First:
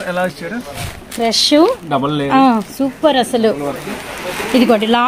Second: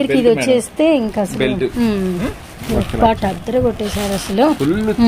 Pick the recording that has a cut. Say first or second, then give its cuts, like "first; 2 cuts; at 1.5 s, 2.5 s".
second; 1 cut; at 2.7 s